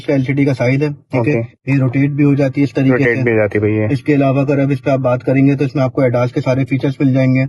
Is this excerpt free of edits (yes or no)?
yes